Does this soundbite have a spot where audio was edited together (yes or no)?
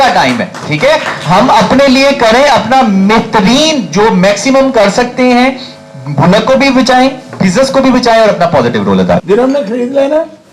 yes